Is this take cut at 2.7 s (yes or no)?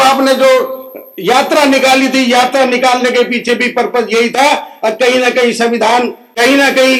no